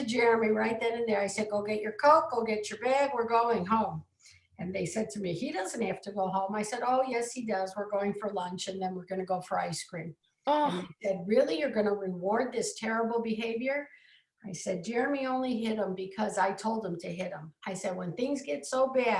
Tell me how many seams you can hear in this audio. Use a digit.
0